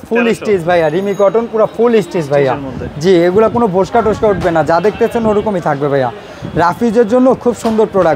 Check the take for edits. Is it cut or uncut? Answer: uncut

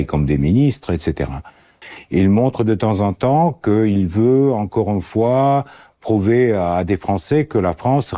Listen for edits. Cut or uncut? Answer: cut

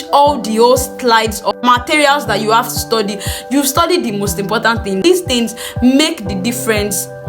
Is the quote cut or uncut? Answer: cut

